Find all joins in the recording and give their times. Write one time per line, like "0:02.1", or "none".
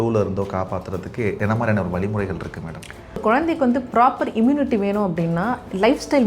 0:01.4
0:03.2